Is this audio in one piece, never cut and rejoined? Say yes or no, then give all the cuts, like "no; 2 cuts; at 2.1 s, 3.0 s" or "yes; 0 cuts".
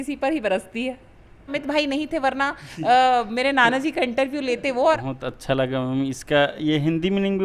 no; 2 cuts; at 1.5 s, 5.0 s